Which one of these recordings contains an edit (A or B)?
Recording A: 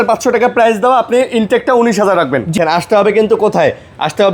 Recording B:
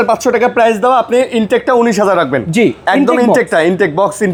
A